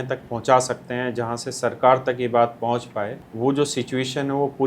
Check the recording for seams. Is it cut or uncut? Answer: cut